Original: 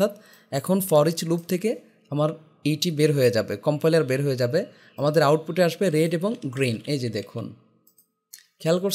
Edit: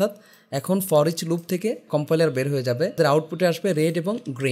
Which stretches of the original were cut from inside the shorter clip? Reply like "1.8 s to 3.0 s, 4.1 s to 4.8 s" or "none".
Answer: 1.8 s to 3.6 s, 4.7 s to 5.1 s

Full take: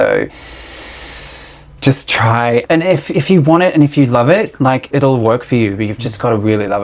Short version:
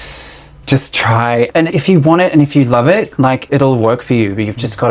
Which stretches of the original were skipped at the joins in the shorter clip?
2.8 s to 3.1 s

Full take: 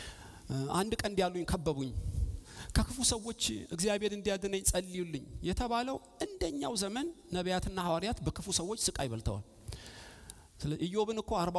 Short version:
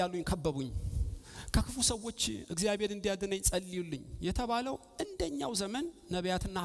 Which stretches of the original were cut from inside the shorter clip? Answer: none

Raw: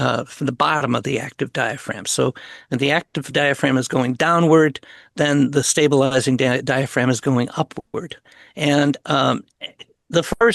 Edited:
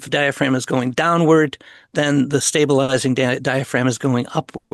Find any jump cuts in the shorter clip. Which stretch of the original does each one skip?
none

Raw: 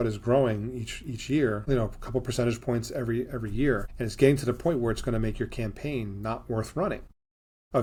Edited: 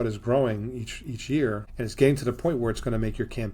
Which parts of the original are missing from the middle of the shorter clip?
1.6 s to 3.8 s

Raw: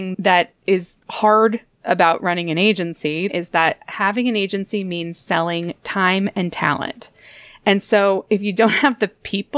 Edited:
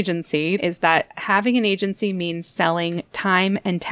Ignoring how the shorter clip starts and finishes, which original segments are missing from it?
none

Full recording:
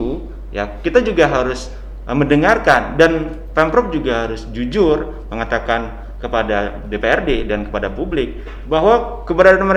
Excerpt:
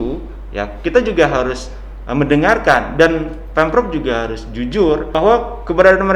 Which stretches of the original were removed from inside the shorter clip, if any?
5.1 s to 8.7 s

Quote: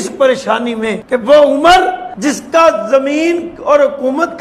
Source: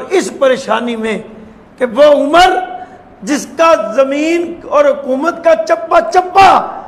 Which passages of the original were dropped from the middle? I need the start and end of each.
1.2 s to 1.7 s, 2.8 s to 3.1 s

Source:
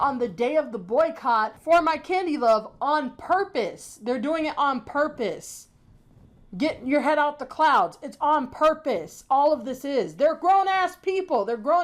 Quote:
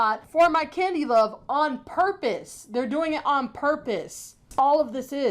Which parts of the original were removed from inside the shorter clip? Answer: 5.7 s to 9.1 s

